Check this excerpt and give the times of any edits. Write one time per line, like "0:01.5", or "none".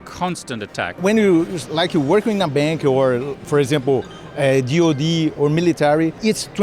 0:00.9